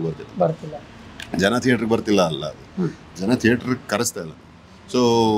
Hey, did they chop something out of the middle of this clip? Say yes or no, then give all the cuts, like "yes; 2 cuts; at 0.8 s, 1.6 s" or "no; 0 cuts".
no; 0 cuts